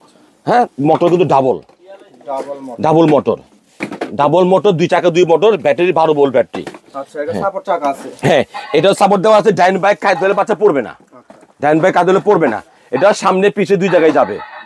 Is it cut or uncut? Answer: uncut